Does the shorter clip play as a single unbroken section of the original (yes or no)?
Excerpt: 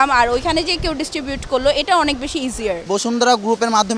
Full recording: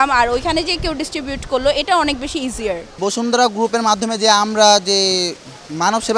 no